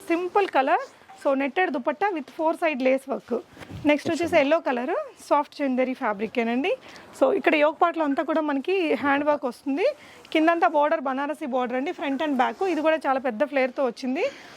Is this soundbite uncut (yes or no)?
yes